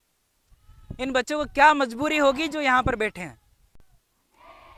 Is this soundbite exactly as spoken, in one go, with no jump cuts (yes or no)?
yes